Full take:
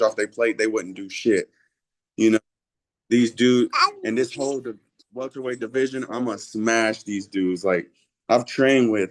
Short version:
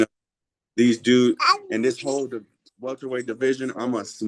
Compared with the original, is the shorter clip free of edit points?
yes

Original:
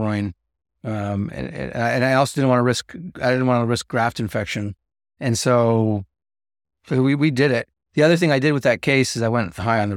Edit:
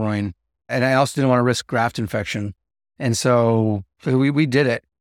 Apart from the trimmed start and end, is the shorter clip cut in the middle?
yes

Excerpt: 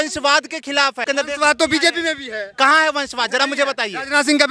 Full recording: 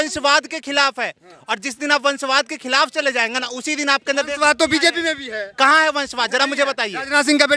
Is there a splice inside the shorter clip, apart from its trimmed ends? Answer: yes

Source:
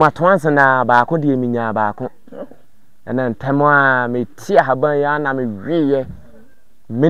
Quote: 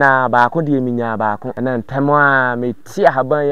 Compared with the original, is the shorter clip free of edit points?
no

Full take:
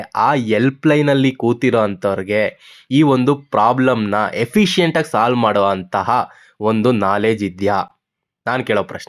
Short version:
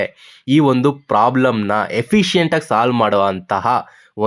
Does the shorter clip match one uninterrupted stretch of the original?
yes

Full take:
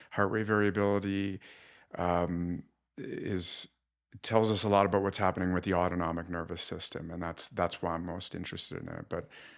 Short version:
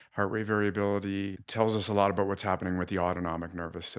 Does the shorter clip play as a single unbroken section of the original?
no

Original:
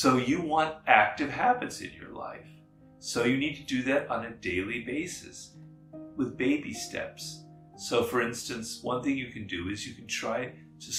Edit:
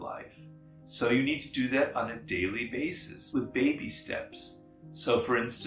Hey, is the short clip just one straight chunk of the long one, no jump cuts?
no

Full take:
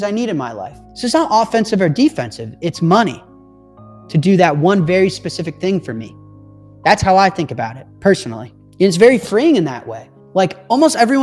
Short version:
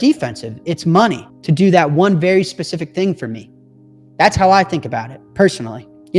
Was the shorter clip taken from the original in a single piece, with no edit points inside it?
no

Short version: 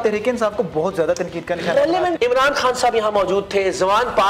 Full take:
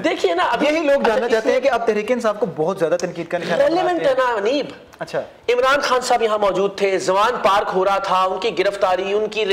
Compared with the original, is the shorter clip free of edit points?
no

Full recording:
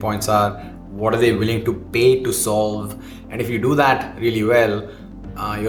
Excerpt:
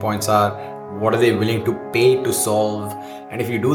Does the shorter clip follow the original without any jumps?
yes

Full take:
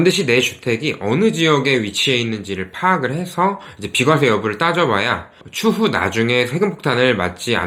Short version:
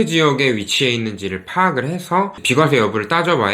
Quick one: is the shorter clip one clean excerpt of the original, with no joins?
no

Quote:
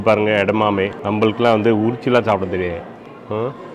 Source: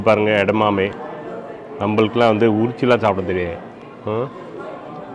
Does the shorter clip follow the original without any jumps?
no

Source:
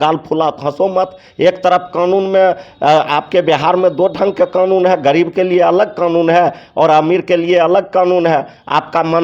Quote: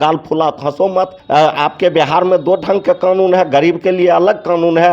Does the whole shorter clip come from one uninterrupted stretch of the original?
no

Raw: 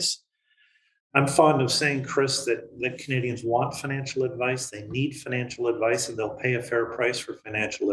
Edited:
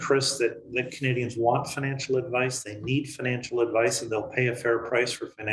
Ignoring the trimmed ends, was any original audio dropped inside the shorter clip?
no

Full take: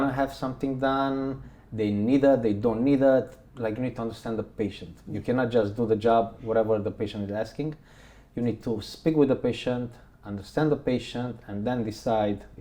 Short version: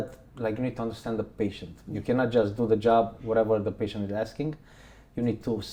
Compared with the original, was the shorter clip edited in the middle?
no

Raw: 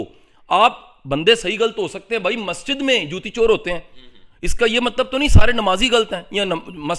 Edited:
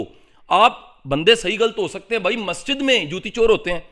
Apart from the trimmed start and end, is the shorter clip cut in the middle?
no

